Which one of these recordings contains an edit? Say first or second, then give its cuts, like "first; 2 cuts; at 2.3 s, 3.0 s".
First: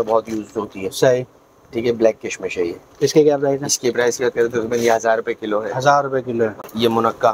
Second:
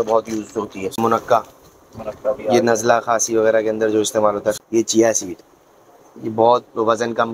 second; 2 cuts; at 1.0 s, 4.6 s